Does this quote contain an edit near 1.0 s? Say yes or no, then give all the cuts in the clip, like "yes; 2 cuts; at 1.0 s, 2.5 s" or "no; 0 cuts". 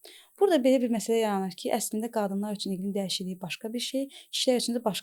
no; 0 cuts